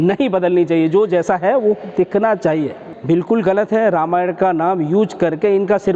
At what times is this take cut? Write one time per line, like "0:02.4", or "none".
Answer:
0:02.9